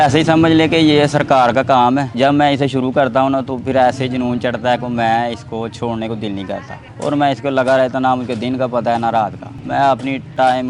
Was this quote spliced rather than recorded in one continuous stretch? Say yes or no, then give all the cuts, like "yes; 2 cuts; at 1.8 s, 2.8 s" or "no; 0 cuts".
no; 0 cuts